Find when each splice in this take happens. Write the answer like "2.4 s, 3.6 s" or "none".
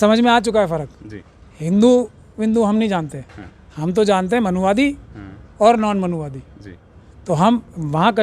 none

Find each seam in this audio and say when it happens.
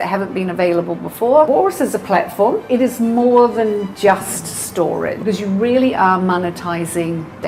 1.5 s, 2.6 s, 5.2 s

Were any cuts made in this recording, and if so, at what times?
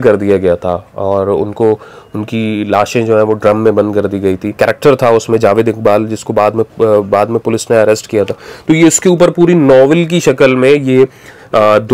4.5 s

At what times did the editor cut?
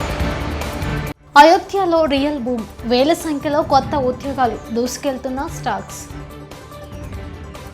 0.9 s

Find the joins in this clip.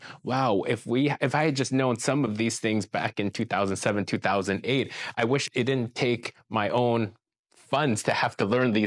none

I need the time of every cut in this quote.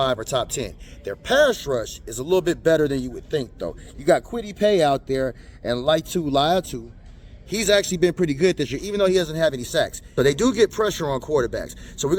10.0 s

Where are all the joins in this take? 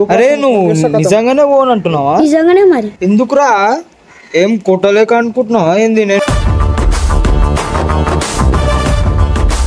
2.9 s

